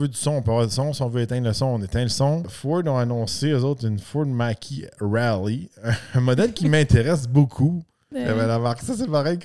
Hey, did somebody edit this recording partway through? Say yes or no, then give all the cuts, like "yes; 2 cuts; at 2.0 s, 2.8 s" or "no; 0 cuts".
yes; 2 cuts; at 2.5 s, 8.1 s